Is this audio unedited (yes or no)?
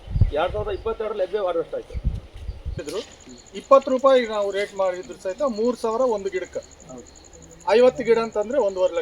no